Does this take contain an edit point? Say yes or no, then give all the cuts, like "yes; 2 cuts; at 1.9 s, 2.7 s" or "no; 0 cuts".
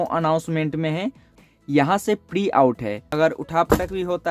yes; 2 cuts; at 1.4 s, 3.0 s